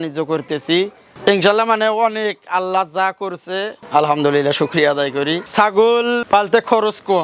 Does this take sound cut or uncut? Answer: cut